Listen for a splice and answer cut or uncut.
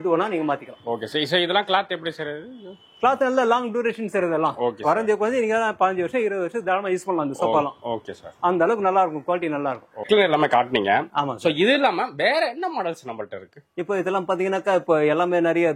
cut